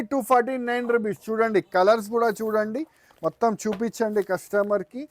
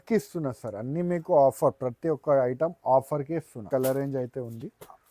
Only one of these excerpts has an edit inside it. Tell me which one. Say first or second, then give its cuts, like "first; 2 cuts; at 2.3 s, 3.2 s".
second; 1 cut; at 3.6 s